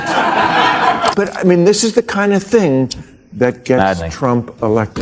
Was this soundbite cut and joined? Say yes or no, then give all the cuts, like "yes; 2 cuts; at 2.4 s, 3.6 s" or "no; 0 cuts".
yes; 1 cut; at 1.1 s